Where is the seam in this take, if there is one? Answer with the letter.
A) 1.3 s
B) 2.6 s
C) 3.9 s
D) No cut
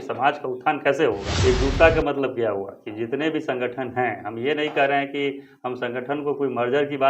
A